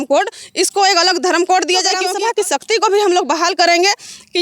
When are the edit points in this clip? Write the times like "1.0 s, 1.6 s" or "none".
2.0 s